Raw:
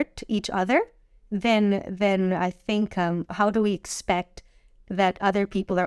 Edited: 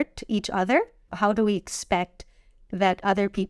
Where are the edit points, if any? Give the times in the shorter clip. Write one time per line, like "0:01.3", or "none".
0:01.1